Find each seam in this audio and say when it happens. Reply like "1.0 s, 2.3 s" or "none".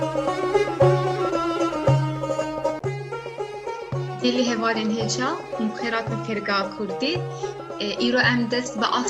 2.8 s, 4.2 s